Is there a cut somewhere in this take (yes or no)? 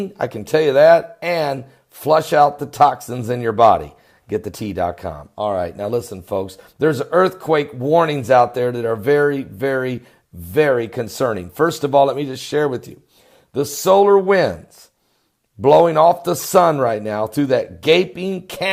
yes